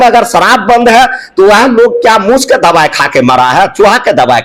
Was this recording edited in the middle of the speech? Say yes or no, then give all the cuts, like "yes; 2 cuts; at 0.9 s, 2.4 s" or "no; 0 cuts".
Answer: no; 0 cuts